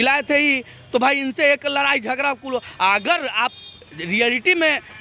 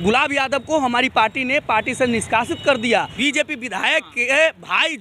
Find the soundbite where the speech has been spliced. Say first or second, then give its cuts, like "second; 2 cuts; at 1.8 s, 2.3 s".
second; 1 cut; at 3.1 s